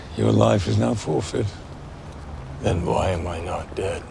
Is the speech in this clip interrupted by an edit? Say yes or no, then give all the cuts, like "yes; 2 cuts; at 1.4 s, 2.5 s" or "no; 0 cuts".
yes; 1 cut; at 2.0 s